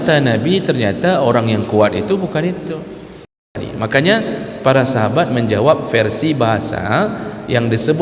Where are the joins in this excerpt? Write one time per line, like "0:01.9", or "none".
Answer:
0:03.6